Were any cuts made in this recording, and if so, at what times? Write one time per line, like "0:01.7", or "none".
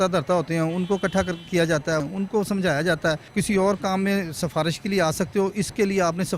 0:02.1
0:03.3